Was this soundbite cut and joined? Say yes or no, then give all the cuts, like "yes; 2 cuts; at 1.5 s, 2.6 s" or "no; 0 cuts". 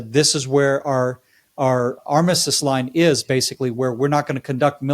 yes; 1 cut; at 2.0 s